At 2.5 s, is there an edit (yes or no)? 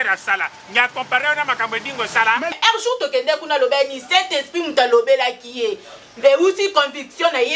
yes